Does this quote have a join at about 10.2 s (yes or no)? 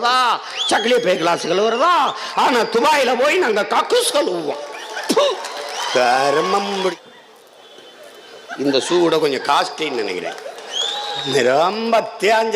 no